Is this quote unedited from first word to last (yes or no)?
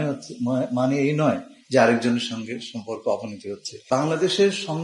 no